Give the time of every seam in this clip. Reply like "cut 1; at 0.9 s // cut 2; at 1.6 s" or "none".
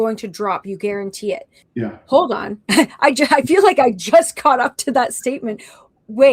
cut 1; at 1.6 s